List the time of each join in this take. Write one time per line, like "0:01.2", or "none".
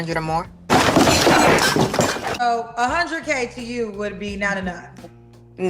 0:00.7
0:02.5